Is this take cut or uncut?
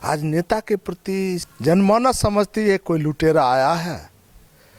cut